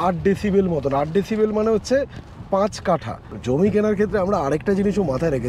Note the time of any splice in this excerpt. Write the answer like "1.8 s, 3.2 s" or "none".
3.3 s